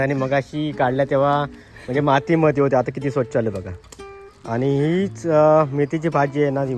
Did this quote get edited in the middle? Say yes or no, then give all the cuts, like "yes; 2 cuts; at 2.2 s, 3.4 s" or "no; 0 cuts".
no; 0 cuts